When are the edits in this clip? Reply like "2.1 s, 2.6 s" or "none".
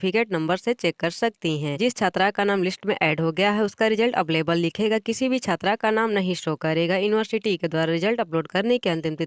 none